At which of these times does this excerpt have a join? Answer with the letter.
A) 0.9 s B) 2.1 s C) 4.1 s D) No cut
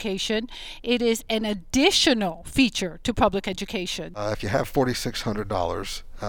C